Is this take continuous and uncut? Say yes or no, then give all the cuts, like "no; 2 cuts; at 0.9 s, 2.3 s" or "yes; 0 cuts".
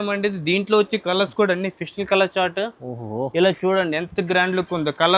yes; 0 cuts